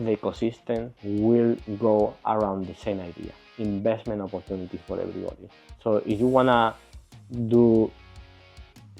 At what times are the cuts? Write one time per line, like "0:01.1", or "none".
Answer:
0:01.0
0:01.7